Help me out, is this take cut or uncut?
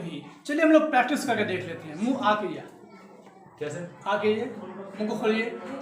uncut